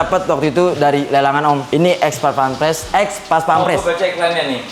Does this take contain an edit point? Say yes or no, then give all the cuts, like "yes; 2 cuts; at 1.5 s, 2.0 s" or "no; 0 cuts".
no; 0 cuts